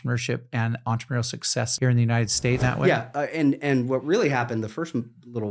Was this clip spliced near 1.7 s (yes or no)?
yes